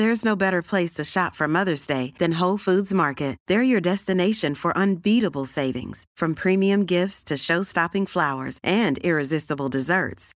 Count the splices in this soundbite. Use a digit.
0